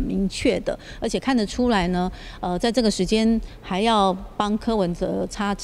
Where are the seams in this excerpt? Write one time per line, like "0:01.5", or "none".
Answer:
none